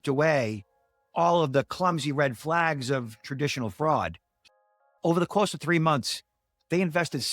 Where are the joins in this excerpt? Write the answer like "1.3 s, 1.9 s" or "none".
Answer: 4.3 s